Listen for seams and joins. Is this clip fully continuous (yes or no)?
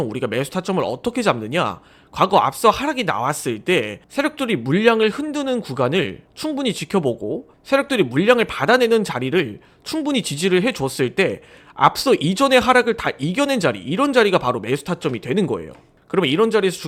yes